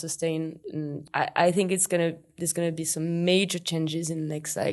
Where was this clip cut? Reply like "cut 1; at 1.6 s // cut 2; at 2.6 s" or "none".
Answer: cut 1; at 1.0 s

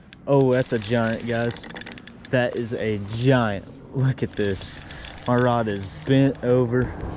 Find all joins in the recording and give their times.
none

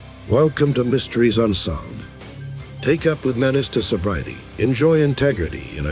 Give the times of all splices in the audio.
cut 1; at 4.7 s

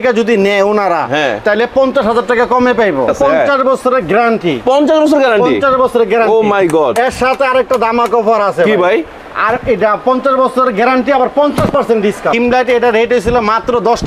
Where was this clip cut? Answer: cut 1; at 3.1 s // cut 2; at 12.3 s

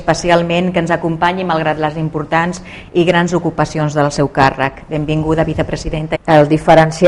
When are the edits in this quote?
none

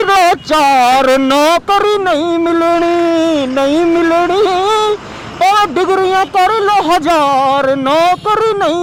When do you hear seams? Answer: none

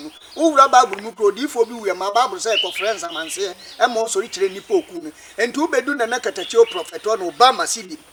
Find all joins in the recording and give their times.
none

